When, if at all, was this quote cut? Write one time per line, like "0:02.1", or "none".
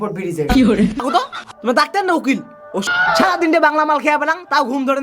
0:01.0
0:02.8